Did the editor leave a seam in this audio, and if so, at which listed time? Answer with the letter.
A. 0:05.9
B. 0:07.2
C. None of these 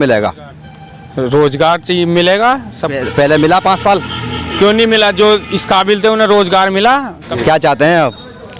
B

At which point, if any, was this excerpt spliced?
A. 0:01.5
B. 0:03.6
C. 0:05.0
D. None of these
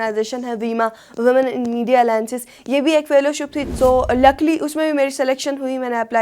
B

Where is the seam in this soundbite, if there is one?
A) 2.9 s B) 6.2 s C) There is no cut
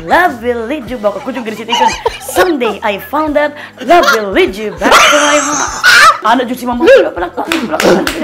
B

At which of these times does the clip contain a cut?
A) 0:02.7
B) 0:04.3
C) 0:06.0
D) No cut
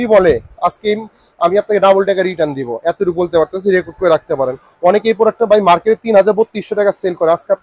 D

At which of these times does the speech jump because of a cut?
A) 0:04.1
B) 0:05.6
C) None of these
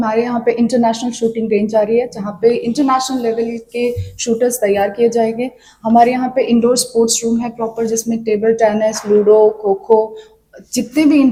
C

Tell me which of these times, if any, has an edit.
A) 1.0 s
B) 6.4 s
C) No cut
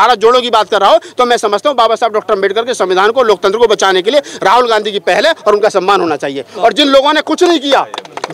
C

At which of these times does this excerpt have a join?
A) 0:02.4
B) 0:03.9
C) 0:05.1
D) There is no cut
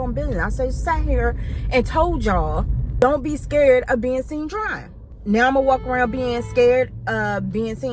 D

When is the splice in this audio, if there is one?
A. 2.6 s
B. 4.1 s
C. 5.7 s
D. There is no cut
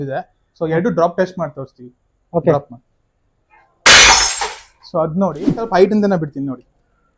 C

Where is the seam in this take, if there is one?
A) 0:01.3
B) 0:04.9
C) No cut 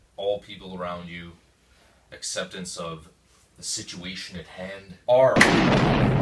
B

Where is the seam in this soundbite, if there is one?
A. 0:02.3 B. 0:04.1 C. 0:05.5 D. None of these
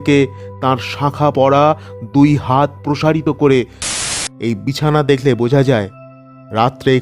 B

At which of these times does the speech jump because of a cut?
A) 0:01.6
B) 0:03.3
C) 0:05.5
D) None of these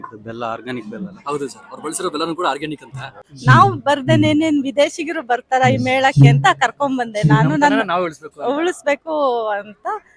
B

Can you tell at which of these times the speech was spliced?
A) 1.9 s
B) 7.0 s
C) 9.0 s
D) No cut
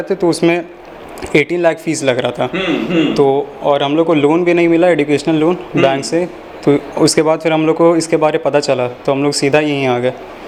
D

